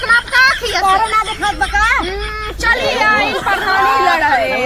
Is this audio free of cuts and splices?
yes; 0 cuts

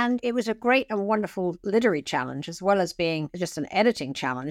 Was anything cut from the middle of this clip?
no; 0 cuts

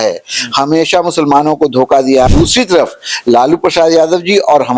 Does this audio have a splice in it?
yes; 1 cut; at 2.3 s

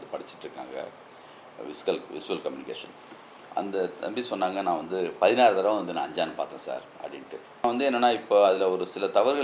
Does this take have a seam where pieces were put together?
yes; 1 cut; at 7.6 s

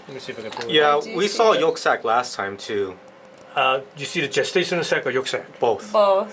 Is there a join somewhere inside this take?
no; 0 cuts

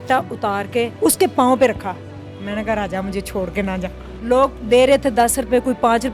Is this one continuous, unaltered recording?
no; 2 cuts; at 0.9 s, 4.1 s

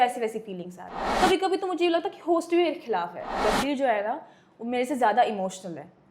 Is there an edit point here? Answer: yes; 2 cuts; at 1.0 s, 3.4 s

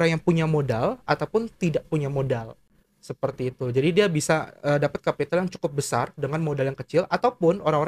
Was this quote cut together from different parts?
no; 0 cuts

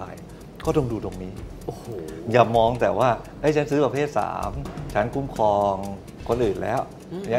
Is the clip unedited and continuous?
yes; 0 cuts

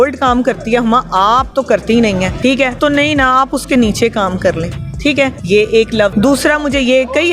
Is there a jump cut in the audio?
yes; 3 cuts; at 2.6 s, 5.2 s, 6.1 s

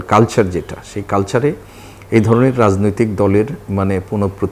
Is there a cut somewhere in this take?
no; 0 cuts

